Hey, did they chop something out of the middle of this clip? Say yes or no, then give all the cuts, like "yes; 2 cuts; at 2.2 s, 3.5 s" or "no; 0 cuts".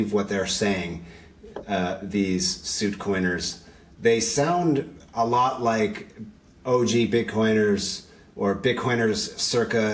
no; 0 cuts